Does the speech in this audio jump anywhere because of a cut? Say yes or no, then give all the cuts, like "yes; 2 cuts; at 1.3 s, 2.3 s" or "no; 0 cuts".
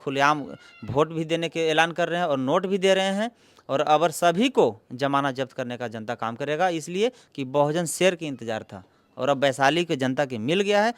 no; 0 cuts